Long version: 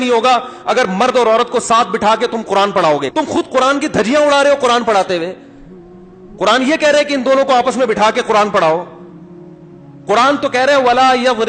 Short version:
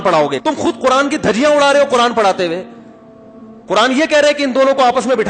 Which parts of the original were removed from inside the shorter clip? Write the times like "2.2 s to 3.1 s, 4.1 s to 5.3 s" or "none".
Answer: none